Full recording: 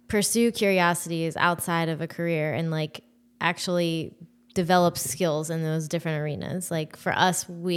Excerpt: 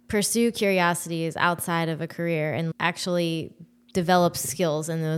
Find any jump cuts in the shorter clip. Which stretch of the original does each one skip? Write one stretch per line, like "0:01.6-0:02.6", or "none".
0:02.7-0:03.3